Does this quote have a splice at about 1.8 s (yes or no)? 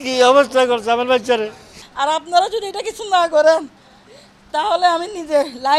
yes